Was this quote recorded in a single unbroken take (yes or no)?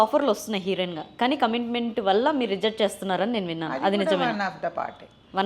yes